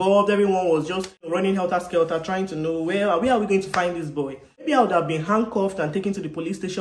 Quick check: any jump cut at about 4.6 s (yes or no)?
yes